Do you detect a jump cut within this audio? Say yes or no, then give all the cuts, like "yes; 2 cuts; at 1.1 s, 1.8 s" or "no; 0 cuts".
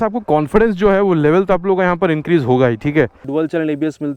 yes; 1 cut; at 3.2 s